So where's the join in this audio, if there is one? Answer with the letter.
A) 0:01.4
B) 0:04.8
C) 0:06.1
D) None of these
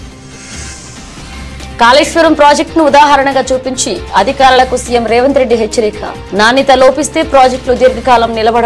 A